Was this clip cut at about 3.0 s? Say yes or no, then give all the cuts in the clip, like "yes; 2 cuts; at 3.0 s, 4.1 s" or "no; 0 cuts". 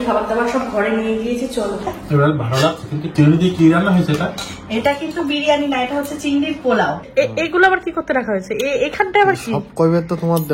yes; 3 cuts; at 2.0 s, 3.0 s, 7.0 s